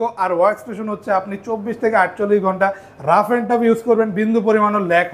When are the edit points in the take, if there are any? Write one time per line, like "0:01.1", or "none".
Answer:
none

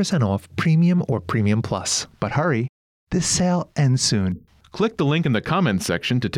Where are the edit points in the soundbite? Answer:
none

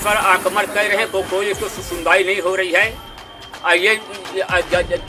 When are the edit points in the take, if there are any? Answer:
none

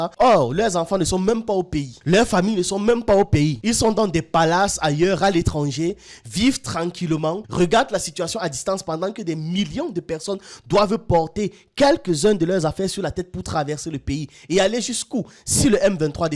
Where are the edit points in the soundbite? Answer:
none

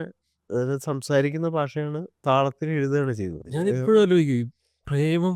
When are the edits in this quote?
0:03.4

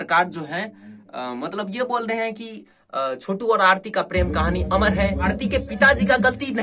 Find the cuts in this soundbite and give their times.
0:05.3

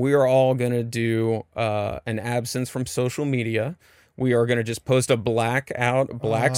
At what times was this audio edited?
none

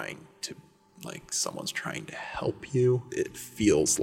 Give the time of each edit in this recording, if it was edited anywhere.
0:03.1

